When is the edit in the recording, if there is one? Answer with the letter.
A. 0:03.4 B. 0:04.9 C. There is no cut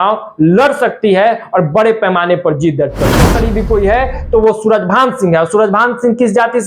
A